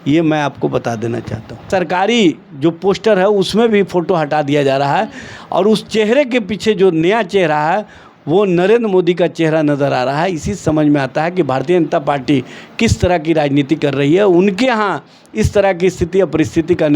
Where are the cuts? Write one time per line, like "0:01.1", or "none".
0:01.7